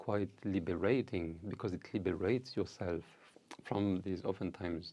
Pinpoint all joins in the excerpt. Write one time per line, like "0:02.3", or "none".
none